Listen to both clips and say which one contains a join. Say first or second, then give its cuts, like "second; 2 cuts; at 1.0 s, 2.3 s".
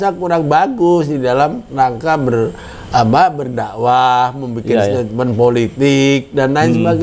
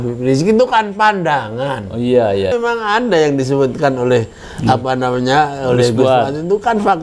second; 1 cut; at 2.5 s